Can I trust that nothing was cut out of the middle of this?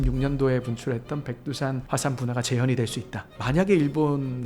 no; 1 cut; at 3.2 s

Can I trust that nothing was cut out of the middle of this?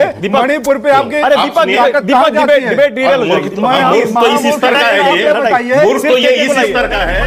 yes; 0 cuts

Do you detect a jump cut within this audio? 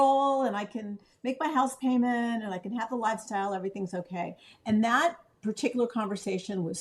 no; 0 cuts

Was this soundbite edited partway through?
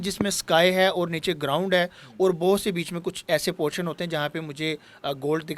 no; 0 cuts

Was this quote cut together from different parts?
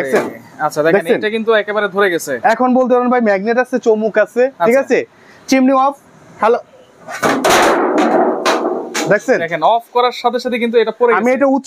no; 0 cuts

